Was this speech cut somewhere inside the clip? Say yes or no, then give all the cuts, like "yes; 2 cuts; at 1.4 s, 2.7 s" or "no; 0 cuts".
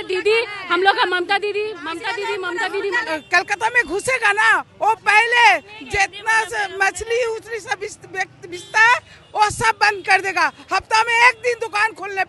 no; 0 cuts